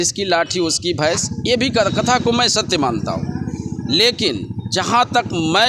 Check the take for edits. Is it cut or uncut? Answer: uncut